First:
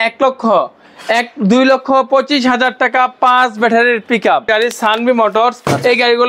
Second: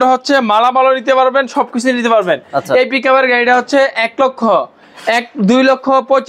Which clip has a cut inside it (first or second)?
first